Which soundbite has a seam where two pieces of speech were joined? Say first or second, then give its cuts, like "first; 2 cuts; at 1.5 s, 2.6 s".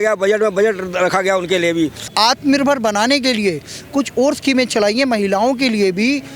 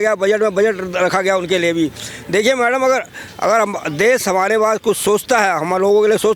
first; 1 cut; at 2.1 s